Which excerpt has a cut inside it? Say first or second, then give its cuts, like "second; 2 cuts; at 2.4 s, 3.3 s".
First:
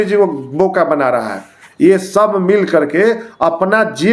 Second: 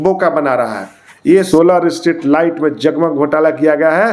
second; 1 cut; at 1.5 s